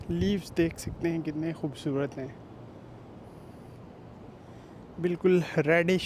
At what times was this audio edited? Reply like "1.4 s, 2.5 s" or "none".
none